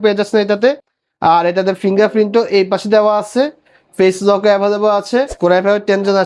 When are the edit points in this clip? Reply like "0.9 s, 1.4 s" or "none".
5.3 s